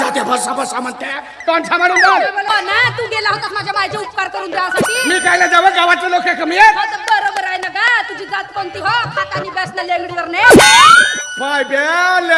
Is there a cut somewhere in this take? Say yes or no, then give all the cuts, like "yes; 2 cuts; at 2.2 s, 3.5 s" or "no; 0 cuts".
yes; 1 cut; at 2.5 s